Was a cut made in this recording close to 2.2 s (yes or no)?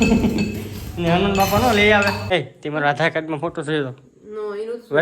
yes